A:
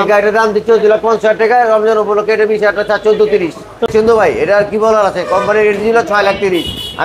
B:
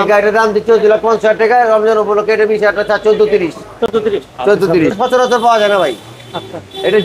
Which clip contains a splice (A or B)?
A